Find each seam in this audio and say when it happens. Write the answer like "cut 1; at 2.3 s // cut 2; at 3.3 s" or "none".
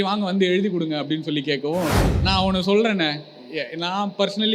cut 1; at 2.1 s